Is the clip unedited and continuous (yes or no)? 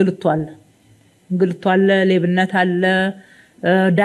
yes